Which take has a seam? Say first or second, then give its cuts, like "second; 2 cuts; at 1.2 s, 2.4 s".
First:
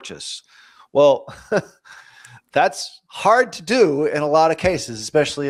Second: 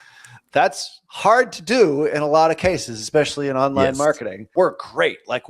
second; 1 cut; at 4.5 s